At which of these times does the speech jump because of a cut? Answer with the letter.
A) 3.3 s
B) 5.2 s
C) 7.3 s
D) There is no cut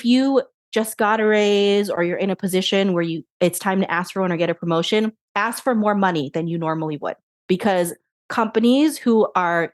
C